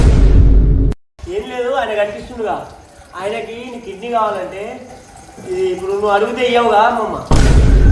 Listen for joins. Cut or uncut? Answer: cut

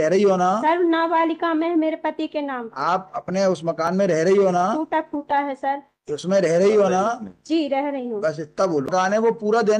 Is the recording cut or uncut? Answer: cut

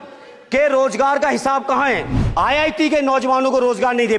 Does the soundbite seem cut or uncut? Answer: cut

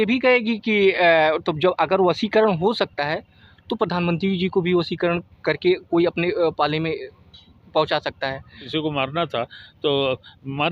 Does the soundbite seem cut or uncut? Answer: cut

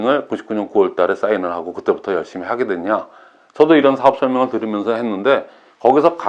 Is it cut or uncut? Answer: uncut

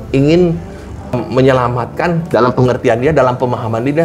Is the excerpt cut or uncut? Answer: cut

